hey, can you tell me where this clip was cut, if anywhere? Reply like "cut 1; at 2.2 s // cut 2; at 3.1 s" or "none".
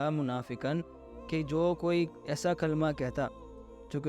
none